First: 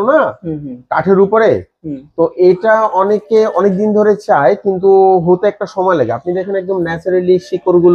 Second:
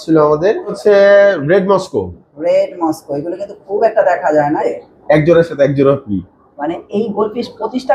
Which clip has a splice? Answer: second; 2 cuts; at 0.8 s, 4.6 s

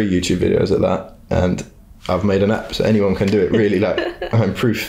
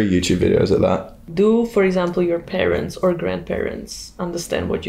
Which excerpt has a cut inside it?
second; 1 cut; at 1.1 s

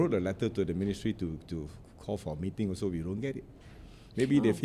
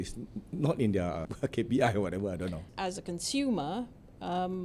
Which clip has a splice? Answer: second; 2 cuts; at 1.3 s, 2.7 s

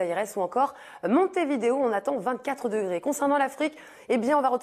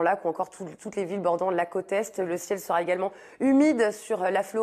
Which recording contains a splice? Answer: first; 1 cut; at 3.2 s

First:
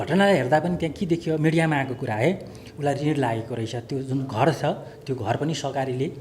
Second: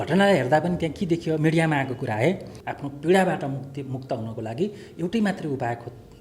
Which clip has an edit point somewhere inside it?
second; 1 cut; at 2.6 s

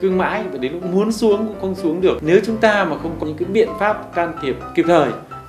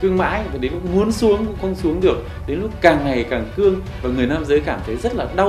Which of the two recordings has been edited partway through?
first; 2 cuts; at 2.2 s, 3.2 s

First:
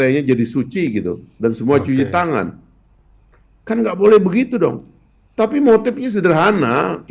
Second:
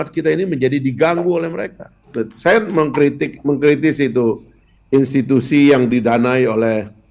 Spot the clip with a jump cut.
second; 1 cut; at 2.2 s

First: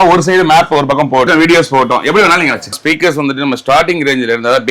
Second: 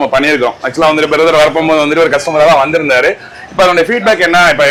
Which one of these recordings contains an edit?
first; 2 cuts; at 1.3 s, 2.8 s

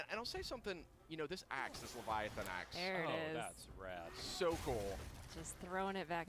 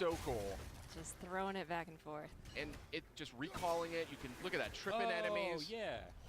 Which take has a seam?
second; 1 cut; at 2.8 s

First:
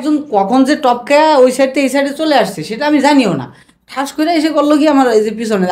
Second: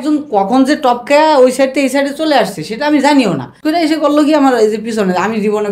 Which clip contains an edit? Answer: second; 1 cut; at 3.5 s

